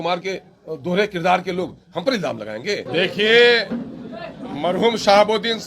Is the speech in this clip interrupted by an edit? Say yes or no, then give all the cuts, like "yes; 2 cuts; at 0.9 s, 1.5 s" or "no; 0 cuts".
no; 0 cuts